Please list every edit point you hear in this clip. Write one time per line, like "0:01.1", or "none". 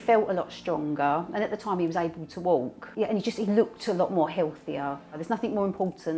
0:02.8
0:05.2